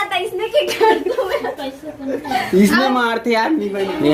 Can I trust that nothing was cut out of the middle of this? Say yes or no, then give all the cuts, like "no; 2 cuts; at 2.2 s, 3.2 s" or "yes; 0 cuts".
yes; 0 cuts